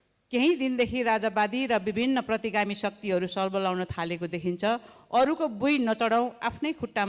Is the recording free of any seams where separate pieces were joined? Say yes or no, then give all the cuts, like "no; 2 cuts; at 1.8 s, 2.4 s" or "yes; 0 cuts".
yes; 0 cuts